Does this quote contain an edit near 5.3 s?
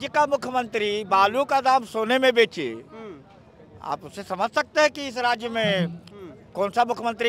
no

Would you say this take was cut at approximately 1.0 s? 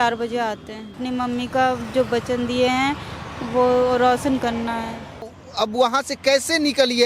yes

